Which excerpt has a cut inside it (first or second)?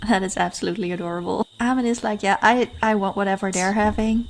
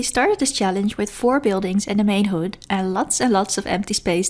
first